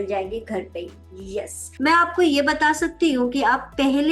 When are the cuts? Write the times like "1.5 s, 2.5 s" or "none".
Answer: 1.6 s